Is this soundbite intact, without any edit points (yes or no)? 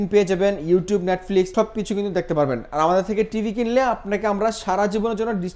yes